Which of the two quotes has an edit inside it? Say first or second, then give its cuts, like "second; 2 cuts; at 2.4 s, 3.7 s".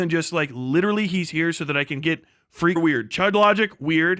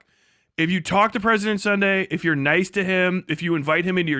first; 1 cut; at 2.8 s